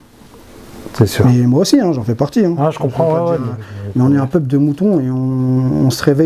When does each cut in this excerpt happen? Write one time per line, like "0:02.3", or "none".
none